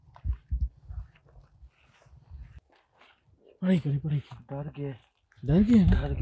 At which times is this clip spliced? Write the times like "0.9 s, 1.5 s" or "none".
2.6 s